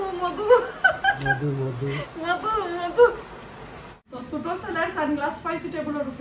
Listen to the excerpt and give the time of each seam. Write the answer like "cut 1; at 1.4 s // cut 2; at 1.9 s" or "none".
cut 1; at 3.9 s